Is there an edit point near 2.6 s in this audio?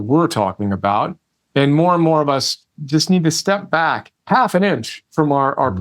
no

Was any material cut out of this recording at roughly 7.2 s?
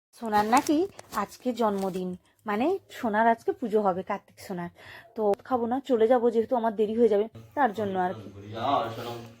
no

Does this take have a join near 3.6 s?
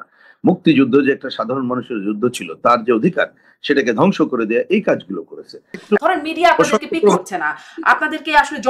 no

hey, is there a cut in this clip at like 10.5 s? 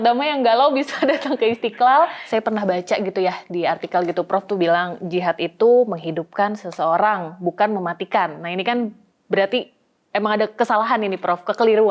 no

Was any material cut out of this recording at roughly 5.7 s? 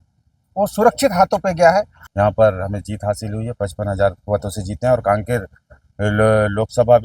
no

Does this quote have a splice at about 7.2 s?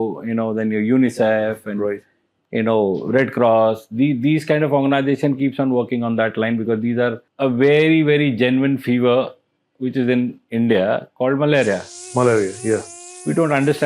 yes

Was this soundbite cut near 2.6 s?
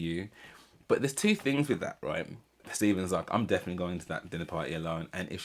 yes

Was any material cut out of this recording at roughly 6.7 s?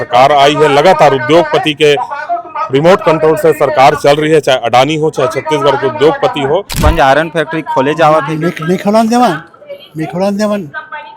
yes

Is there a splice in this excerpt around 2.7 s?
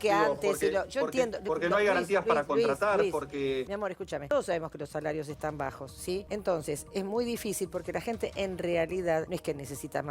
no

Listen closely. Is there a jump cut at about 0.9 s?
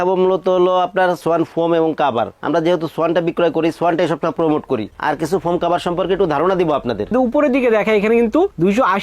no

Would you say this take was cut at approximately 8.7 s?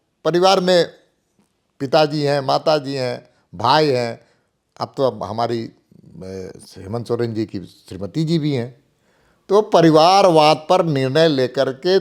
no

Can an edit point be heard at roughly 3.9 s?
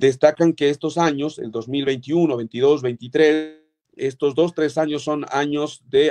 yes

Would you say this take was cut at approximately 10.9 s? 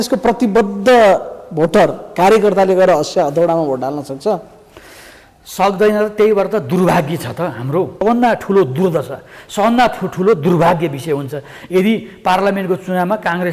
no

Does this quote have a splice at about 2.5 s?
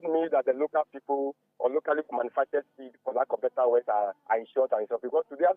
no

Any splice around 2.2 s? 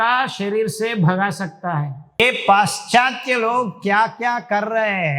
yes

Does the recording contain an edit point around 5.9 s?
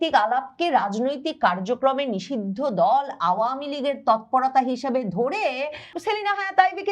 yes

